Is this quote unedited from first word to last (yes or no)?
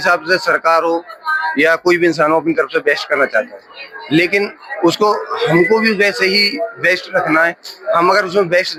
yes